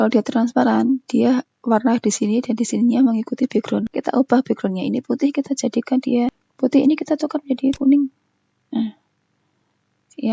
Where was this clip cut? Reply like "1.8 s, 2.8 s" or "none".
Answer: 3.9 s, 6.4 s